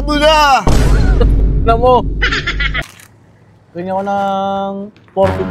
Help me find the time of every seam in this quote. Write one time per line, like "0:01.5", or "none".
0:02.7